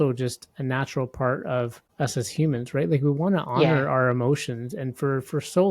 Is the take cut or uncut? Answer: cut